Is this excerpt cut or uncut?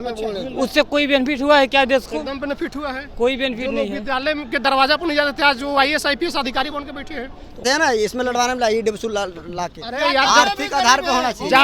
cut